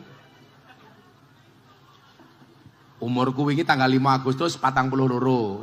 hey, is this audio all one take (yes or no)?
yes